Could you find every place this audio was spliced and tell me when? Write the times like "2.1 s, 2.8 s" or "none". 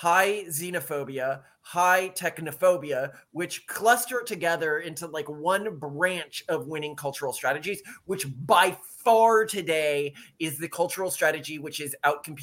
none